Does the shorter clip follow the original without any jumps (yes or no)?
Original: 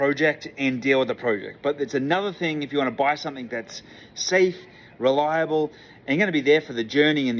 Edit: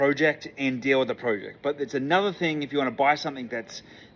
yes